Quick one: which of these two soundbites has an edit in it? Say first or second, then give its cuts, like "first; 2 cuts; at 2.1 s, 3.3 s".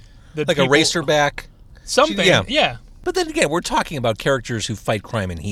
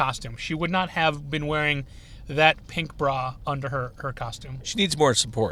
first; 1 cut; at 2.9 s